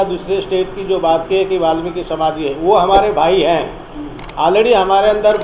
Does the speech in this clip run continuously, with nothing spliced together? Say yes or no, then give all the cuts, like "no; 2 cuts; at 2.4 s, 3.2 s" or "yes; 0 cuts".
yes; 0 cuts